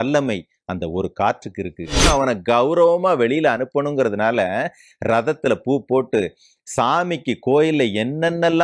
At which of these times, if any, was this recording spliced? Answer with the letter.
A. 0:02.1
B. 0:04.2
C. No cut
A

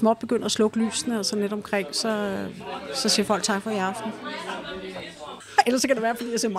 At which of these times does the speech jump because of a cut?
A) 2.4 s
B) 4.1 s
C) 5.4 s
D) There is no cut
C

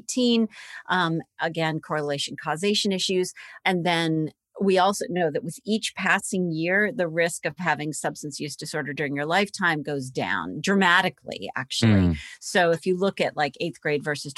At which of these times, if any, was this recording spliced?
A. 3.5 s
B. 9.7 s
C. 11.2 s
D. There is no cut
A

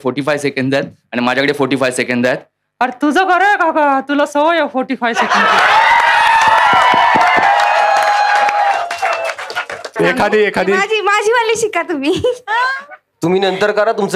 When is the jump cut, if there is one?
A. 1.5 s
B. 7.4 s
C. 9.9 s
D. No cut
C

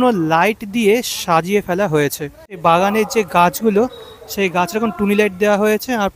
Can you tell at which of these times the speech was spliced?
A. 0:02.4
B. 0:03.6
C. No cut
C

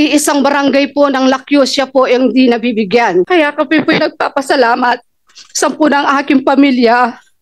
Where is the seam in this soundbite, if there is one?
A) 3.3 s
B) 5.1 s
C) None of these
A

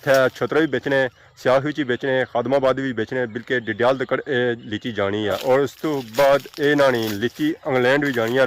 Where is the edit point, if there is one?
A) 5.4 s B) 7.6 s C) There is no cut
A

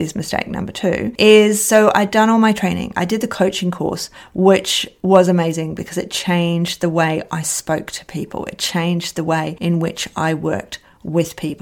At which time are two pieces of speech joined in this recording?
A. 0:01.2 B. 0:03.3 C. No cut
C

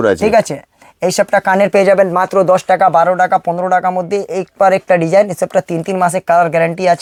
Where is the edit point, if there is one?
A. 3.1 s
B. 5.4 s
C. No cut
C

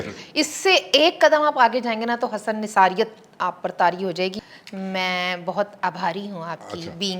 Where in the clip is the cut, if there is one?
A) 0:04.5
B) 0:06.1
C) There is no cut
A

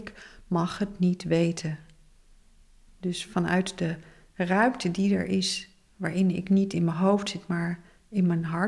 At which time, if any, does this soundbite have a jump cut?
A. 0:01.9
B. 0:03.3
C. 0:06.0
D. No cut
D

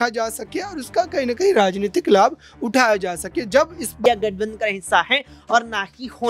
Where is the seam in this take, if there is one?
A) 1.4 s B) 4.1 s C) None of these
B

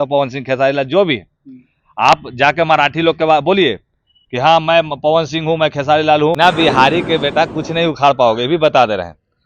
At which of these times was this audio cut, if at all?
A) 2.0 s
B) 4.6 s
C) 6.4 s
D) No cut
C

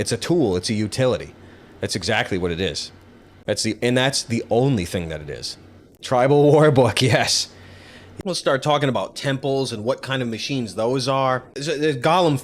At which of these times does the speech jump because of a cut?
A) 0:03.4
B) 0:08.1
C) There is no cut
B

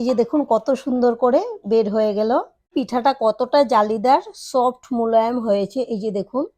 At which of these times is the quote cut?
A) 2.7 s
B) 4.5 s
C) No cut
A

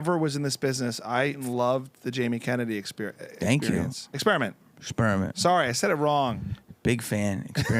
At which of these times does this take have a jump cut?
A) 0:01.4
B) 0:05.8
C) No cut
A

